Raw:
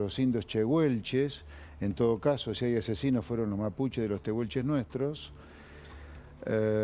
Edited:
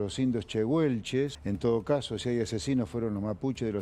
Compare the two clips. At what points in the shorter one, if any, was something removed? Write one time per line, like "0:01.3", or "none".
0:01.4